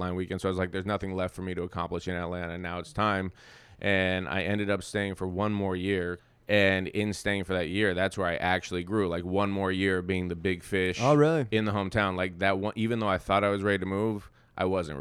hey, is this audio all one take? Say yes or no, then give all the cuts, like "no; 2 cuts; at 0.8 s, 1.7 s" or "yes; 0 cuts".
no; 1 cut; at 6.2 s